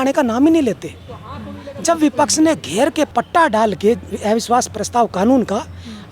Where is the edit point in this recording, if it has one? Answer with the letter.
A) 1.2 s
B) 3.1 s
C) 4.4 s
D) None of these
B